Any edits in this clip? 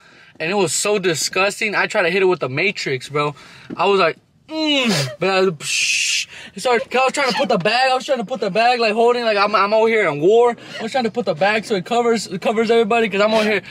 yes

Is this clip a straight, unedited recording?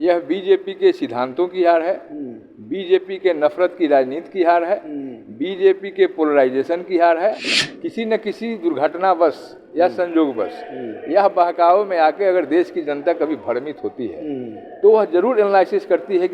no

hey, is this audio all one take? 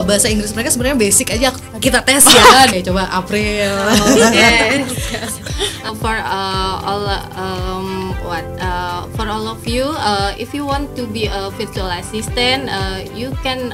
no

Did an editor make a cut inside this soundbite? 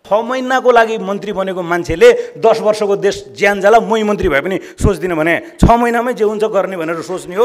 no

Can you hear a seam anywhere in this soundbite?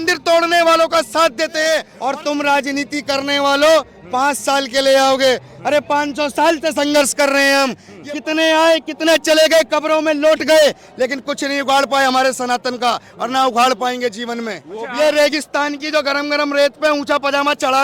yes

